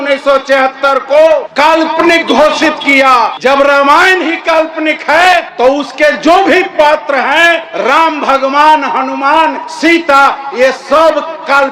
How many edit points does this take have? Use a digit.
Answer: 5